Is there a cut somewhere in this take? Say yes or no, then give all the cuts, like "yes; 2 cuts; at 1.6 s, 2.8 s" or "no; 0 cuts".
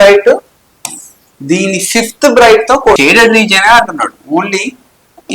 yes; 1 cut; at 2.9 s